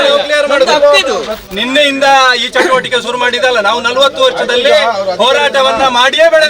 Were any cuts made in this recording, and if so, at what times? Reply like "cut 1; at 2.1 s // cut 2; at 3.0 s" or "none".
cut 1; at 1.4 s